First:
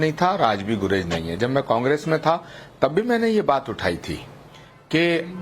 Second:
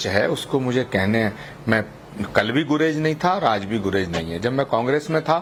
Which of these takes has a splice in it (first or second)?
first